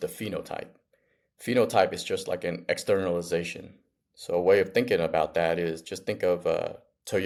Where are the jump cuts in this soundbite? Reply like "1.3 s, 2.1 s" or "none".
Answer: none